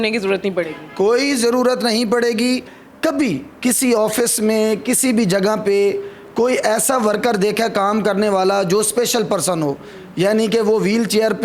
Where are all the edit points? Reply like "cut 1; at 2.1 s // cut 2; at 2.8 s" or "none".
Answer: cut 1; at 2.8 s